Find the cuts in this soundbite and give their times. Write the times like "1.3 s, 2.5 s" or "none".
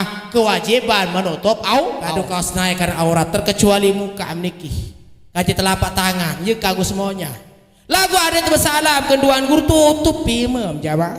2.1 s